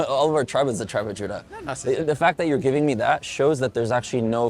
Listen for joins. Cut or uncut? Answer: uncut